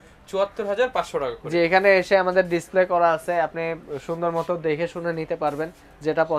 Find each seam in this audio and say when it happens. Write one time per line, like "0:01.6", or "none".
none